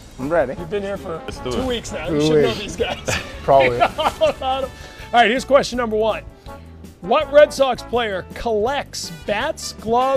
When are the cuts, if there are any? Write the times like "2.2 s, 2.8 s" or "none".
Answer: 4.4 s